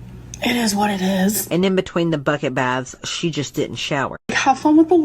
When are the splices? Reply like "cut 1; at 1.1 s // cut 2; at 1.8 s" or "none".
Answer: cut 1; at 4.1 s